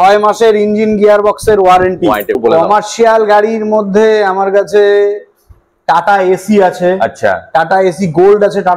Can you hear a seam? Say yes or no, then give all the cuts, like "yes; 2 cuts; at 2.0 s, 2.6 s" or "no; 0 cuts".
yes; 1 cut; at 2.4 s